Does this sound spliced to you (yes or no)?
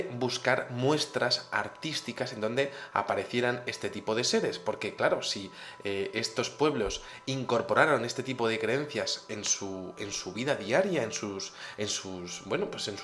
no